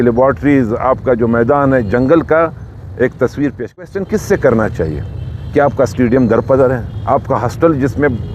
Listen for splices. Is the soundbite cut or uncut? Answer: cut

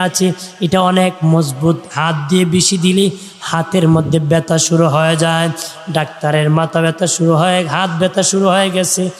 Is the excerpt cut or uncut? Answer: uncut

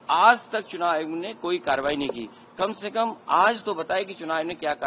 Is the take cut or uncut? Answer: uncut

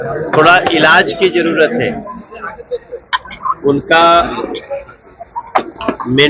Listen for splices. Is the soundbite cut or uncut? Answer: uncut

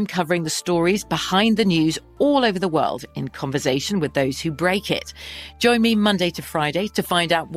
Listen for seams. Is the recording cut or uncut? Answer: uncut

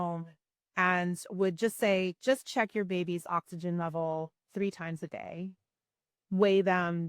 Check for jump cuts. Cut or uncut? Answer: uncut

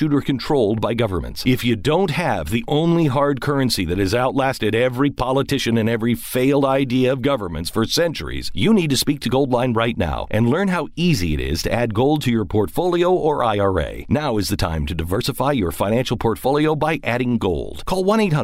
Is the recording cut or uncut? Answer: uncut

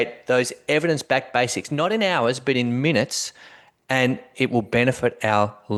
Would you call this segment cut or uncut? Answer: uncut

